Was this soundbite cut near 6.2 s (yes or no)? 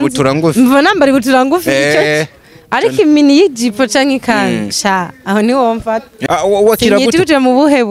yes